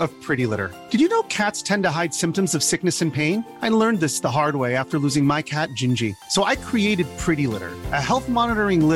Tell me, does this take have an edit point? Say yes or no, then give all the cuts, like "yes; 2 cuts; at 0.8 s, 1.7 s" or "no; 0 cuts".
no; 0 cuts